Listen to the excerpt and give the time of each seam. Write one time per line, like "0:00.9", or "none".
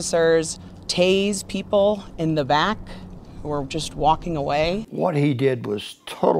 0:04.9

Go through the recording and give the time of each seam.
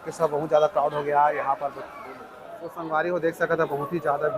0:02.9

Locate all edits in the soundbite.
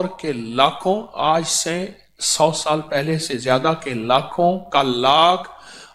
none

